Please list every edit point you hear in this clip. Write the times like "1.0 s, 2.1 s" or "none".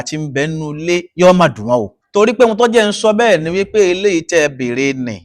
2.0 s